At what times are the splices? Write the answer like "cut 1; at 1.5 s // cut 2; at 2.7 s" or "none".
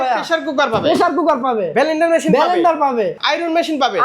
cut 1; at 3.2 s